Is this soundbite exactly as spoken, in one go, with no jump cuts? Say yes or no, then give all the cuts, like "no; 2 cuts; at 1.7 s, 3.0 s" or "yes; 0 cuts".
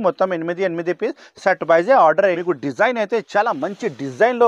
no; 1 cut; at 2.4 s